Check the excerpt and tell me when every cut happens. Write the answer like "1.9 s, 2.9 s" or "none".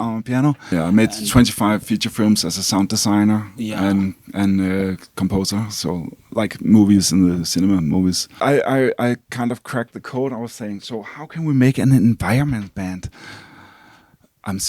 0.7 s, 8.4 s